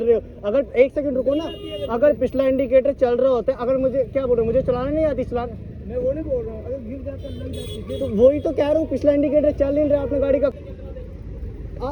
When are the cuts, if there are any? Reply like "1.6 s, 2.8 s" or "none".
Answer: 10.5 s